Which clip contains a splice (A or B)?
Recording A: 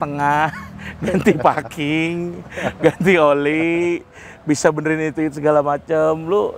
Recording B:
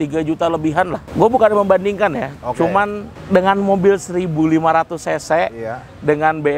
B